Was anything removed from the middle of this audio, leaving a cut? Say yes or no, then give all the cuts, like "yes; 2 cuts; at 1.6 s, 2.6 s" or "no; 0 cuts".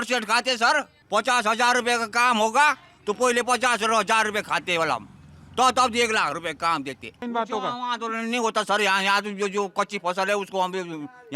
yes; 2 cuts; at 1.0 s, 7.2 s